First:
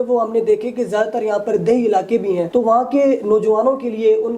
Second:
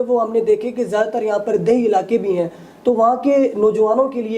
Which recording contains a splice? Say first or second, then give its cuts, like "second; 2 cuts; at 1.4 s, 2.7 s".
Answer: first; 1 cut; at 2.5 s